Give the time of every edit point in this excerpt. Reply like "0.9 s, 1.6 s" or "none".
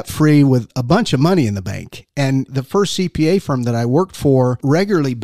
2.5 s